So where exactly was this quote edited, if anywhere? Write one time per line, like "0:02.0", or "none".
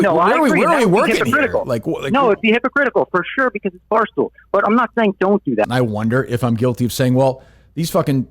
0:05.7

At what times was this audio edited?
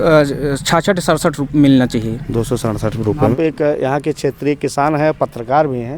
0:03.3

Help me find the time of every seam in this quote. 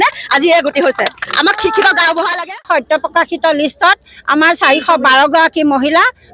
0:02.7

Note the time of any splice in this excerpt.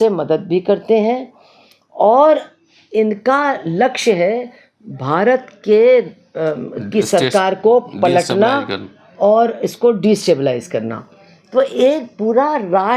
none

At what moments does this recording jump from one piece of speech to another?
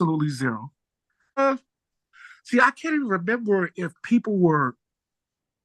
0:01.4

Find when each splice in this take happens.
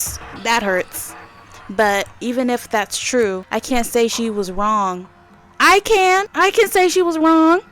0:02.1
0:03.4
0:06.3

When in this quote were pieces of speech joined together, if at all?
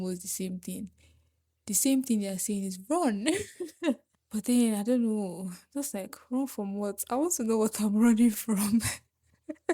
0:04.2

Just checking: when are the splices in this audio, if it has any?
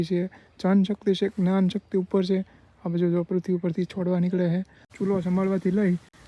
0:04.8

